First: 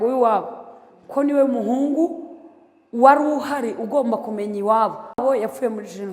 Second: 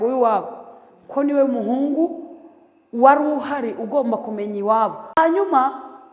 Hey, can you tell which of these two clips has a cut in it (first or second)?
second